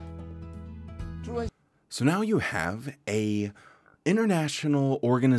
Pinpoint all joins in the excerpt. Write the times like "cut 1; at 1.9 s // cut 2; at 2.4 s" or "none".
none